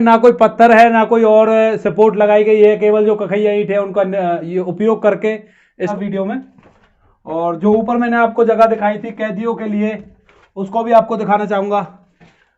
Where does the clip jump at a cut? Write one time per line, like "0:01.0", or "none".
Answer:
0:05.9